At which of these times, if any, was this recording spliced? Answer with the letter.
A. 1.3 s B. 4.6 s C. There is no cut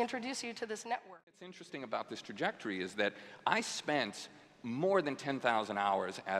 A